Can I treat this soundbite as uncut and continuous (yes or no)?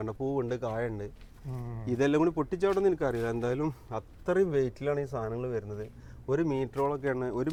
yes